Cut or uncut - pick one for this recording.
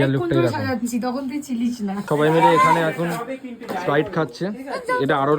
cut